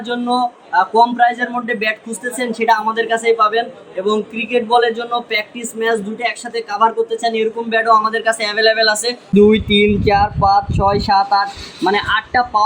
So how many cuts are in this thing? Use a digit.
1